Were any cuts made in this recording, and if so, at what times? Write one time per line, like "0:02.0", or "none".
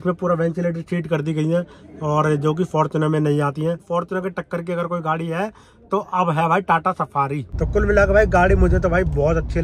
0:03.8
0:07.5